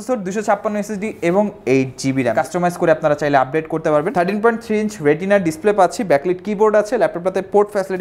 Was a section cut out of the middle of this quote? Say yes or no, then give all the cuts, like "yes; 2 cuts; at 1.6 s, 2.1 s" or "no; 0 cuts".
yes; 2 cuts; at 2.3 s, 4.1 s